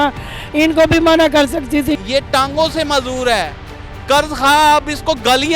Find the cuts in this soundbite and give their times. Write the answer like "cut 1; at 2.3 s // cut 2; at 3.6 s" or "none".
cut 1; at 2.0 s

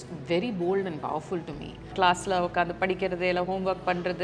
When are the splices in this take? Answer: cut 1; at 1.9 s

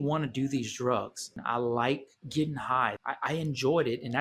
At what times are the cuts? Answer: cut 1; at 1.3 s // cut 2; at 3.0 s

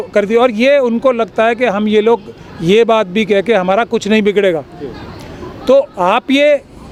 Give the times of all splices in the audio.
none

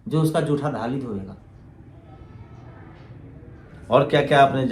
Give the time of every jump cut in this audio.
none

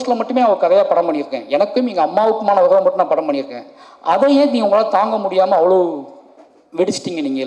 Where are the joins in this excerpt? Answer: none

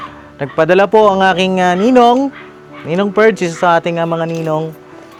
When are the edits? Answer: none

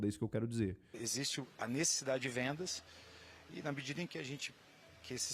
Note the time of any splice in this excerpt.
cut 1; at 1.0 s

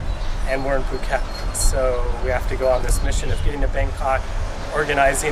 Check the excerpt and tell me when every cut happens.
cut 1; at 1.4 s

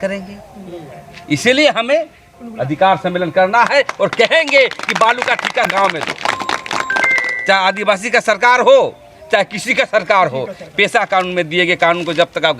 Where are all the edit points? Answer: cut 1; at 5.7 s

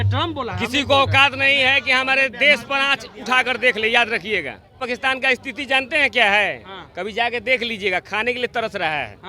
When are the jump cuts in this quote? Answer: cut 1; at 4.8 s

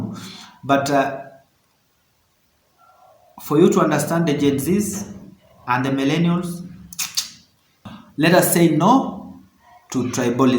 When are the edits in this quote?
cut 1; at 7.9 s

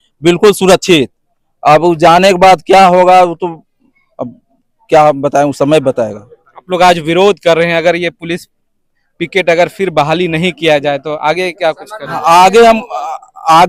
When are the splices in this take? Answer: none

